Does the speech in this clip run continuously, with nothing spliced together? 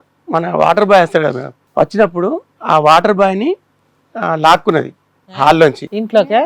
no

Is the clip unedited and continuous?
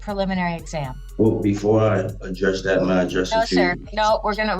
no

